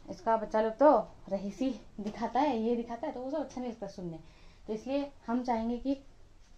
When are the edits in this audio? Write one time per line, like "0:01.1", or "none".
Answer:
none